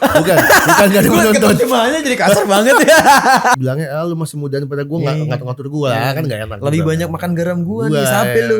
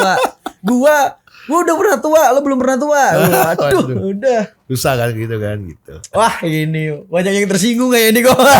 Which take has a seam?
first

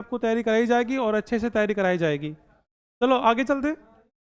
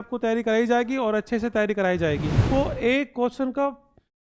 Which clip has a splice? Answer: second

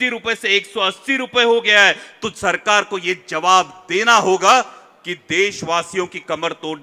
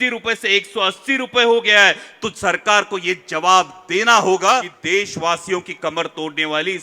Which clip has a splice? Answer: second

